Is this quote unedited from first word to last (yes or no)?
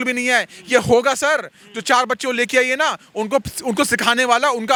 yes